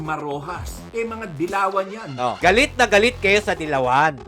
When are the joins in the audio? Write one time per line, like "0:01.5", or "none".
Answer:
0:00.8
0:02.4